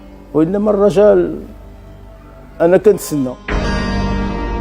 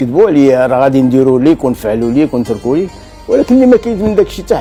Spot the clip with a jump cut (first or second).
first